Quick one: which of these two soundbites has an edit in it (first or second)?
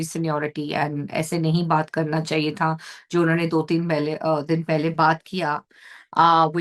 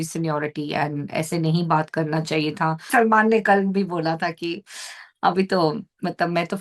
second